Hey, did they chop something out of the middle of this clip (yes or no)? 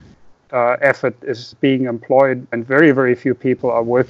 yes